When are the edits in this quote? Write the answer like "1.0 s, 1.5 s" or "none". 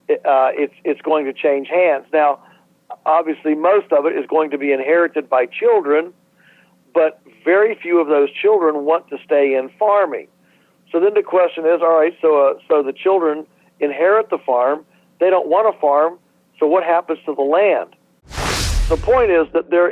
18.4 s